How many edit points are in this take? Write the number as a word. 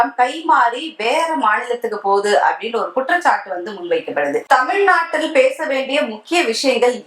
zero